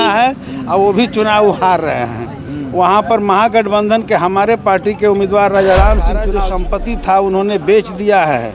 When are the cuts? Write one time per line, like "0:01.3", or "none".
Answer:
0:06.3